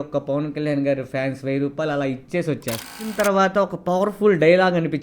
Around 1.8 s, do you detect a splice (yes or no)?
no